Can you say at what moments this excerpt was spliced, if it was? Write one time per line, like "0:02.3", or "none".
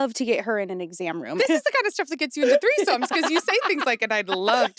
0:01.4